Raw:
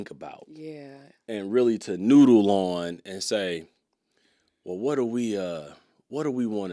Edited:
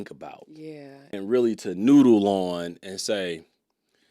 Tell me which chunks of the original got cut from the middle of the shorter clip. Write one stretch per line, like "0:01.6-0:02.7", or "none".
0:01.1-0:01.4